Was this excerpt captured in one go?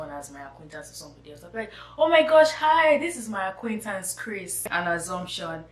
no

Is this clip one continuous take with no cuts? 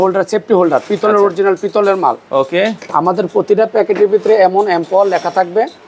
yes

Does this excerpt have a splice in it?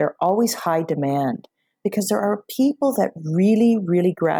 no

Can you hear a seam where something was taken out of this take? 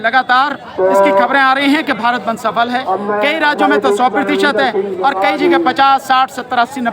no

